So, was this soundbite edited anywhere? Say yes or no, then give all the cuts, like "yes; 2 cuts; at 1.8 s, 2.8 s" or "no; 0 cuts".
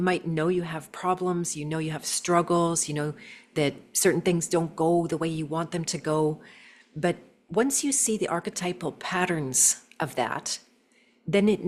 no; 0 cuts